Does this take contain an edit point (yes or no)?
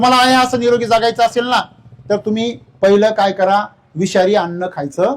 no